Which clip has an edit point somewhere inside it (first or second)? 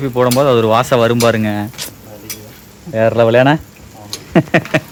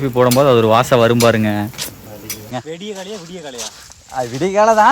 second